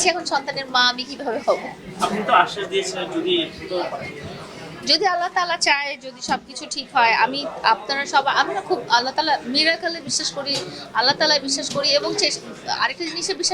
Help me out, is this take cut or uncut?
uncut